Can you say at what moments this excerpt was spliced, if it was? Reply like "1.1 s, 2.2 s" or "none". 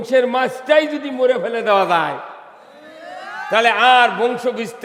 none